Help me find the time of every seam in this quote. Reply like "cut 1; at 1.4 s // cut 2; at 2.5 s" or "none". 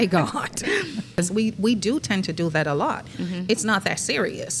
cut 1; at 1.1 s